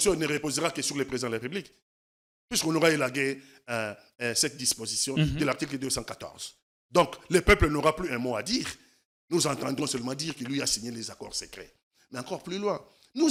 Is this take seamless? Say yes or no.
yes